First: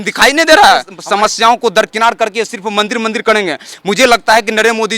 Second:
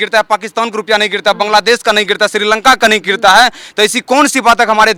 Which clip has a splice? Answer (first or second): first